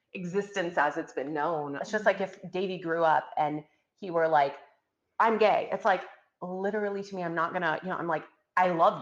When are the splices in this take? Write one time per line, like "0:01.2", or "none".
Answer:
0:01.8